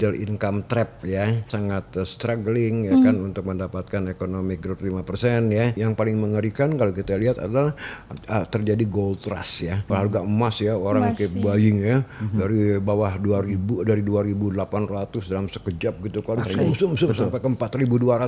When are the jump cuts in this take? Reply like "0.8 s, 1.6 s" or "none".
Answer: 1.4 s, 5.8 s, 9.8 s